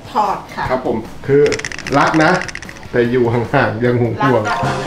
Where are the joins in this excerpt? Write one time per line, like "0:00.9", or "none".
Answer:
0:01.0